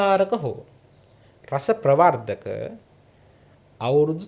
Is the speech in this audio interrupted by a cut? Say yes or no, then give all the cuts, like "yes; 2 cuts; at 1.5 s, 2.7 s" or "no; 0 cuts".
no; 0 cuts